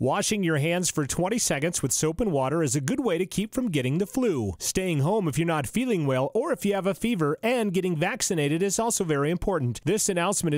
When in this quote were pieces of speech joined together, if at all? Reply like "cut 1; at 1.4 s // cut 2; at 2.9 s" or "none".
none